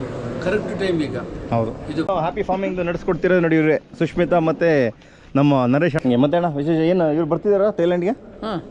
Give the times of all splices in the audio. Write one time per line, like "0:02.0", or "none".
0:02.1
0:06.0